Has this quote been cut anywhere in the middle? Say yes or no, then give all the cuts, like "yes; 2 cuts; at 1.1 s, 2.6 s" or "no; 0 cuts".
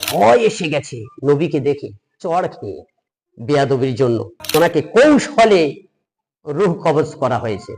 yes; 1 cut; at 4.4 s